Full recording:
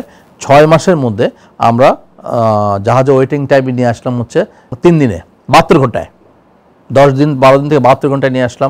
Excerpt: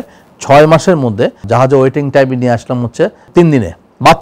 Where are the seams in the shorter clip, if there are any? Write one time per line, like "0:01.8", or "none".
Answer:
0:01.4
0:03.2